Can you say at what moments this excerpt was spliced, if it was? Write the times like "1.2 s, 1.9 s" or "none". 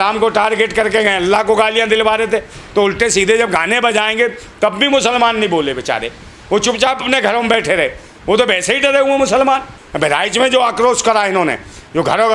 9.8 s